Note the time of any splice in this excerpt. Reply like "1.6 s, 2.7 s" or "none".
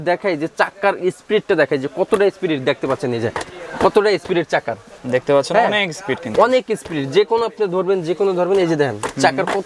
none